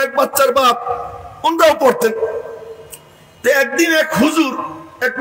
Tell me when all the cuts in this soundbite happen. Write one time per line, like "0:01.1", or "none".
none